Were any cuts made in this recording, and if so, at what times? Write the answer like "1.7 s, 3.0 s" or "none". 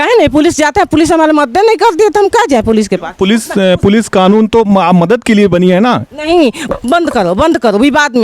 6.6 s